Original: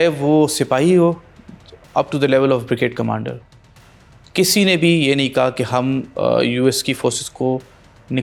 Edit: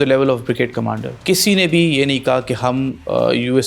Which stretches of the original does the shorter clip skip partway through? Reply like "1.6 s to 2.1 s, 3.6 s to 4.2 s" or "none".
3.3 s to 4.2 s